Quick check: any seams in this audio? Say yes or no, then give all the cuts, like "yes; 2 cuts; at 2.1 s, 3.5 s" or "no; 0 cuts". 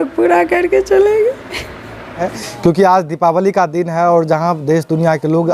yes; 1 cut; at 2.2 s